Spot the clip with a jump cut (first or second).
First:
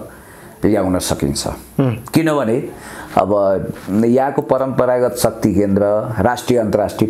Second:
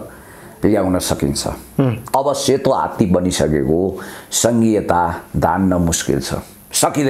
second